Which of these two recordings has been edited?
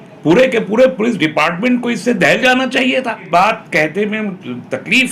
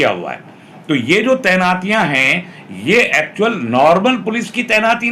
first; 1 cut; at 3.2 s

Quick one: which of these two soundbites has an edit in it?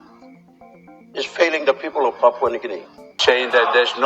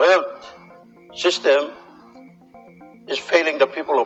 first; 1 cut; at 3.1 s

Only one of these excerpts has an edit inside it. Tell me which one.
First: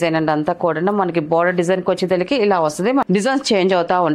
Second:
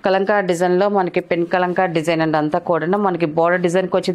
first; 1 cut; at 3.0 s

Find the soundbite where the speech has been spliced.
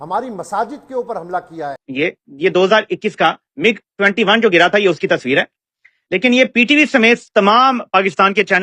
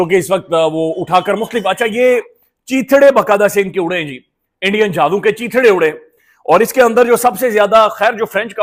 first; 1 cut; at 1.8 s

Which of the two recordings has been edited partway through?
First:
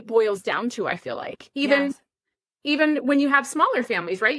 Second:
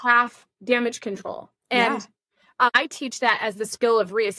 second; 1 cut; at 2.7 s

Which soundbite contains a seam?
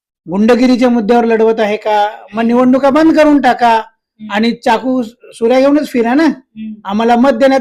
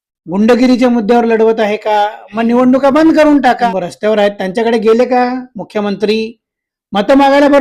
second; 1 cut; at 3.7 s

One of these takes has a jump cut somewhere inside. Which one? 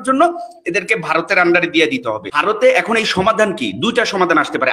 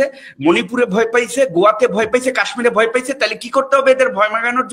first; 1 cut; at 2.3 s

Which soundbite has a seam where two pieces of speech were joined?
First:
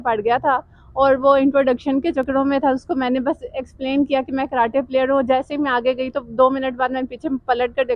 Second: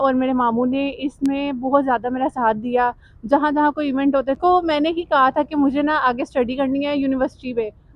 second; 1 cut; at 4.4 s

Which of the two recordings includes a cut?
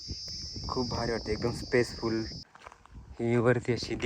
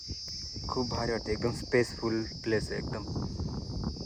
first; 1 cut; at 2.3 s

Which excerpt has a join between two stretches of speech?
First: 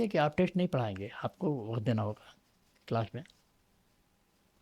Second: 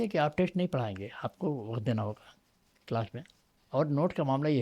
second; 1 cut; at 3.6 s

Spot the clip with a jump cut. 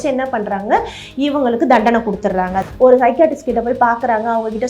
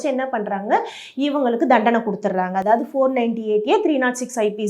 first; 1 cut; at 2.6 s

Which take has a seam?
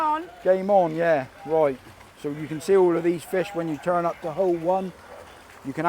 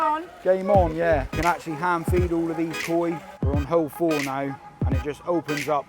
second; 2 cuts; at 1.3 s, 3.3 s

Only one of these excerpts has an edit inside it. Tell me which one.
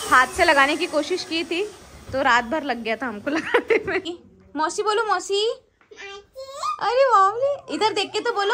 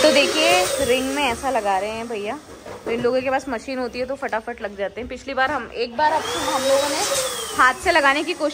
first; 1 cut; at 4.1 s

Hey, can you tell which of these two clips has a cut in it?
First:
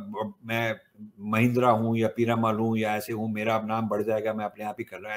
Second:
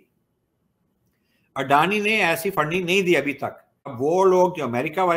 second; 1 cut; at 3.9 s

